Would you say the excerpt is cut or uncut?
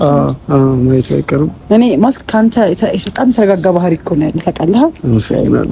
uncut